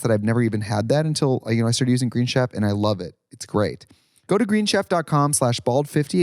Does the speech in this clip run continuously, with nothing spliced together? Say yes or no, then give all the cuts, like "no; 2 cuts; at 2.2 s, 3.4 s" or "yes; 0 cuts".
no; 1 cut; at 4.0 s